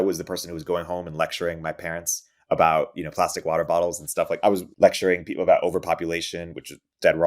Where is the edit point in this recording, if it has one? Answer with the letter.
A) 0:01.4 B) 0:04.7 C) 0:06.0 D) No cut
B